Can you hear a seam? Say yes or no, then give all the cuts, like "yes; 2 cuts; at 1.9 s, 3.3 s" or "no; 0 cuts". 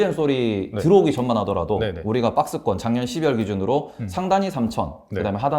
no; 0 cuts